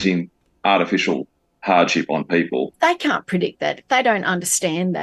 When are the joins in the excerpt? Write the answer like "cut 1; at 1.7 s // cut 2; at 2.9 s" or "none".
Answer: cut 1; at 2.7 s